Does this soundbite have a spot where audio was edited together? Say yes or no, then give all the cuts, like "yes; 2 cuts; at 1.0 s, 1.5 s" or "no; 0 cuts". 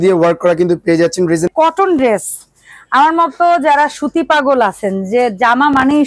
yes; 1 cut; at 1.5 s